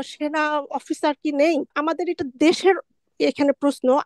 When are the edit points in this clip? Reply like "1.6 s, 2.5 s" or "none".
1.7 s